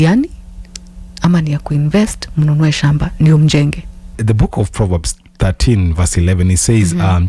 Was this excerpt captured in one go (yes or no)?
no